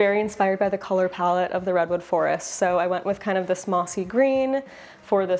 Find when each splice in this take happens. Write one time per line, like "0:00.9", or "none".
none